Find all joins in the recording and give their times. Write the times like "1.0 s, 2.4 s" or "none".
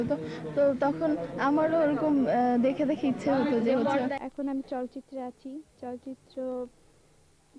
4.0 s